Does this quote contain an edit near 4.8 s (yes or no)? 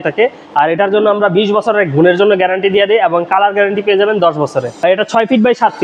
yes